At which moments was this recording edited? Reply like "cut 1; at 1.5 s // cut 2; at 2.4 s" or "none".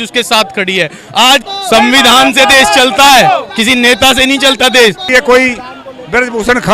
cut 1; at 1.4 s // cut 2; at 5.1 s